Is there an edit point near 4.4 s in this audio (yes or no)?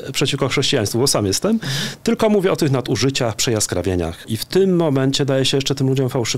yes